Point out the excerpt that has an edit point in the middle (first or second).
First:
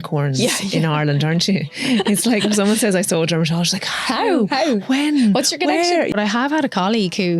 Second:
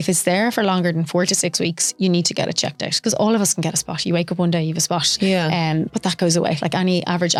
first